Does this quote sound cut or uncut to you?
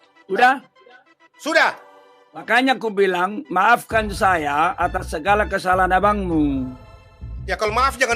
cut